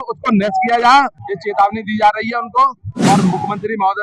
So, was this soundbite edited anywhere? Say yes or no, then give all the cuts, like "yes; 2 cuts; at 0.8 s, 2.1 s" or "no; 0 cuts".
yes; 1 cut; at 1.2 s